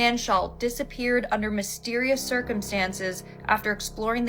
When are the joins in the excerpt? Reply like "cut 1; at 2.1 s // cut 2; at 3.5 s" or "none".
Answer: none